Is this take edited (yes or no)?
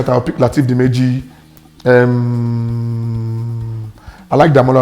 no